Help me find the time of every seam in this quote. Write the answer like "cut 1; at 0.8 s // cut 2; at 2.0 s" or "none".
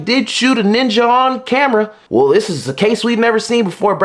cut 1; at 2.0 s